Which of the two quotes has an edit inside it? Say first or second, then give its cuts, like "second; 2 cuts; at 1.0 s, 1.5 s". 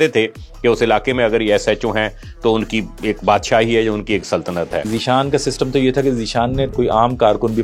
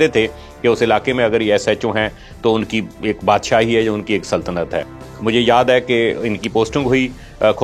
first; 2 cuts; at 4.9 s, 6.7 s